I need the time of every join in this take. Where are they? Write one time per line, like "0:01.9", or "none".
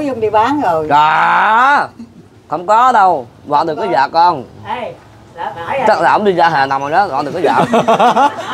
none